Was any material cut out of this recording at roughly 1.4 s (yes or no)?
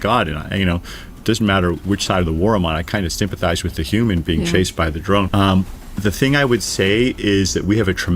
no